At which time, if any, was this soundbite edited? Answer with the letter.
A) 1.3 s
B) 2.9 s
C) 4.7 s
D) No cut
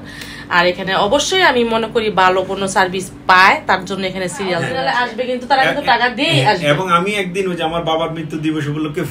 C